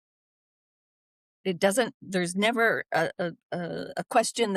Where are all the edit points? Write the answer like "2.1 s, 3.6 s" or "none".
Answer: none

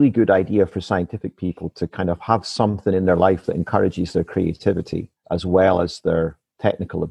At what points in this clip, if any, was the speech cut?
5.1 s

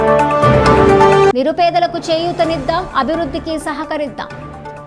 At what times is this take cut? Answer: 1.3 s

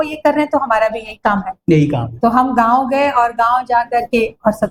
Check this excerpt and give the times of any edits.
none

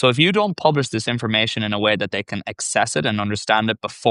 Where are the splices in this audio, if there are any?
none

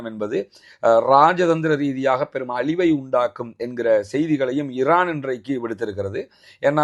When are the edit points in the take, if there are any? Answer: none

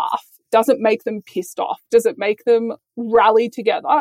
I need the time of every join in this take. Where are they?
2.7 s

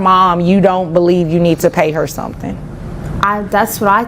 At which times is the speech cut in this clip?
3.1 s

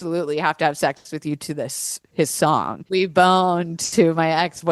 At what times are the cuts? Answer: 2.8 s

